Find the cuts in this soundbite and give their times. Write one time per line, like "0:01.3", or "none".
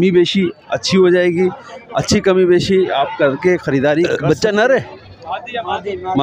0:04.1